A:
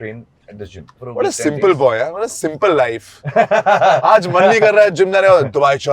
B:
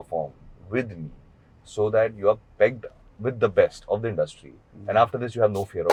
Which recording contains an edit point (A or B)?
A